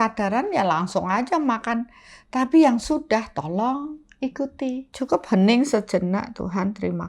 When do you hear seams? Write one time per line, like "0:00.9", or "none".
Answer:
0:04.9